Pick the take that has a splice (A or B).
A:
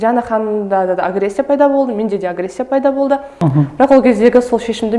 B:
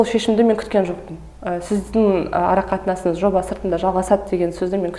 A